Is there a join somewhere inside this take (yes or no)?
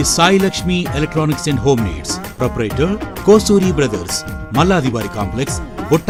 no